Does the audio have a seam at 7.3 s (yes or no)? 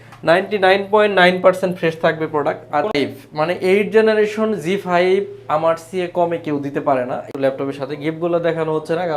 yes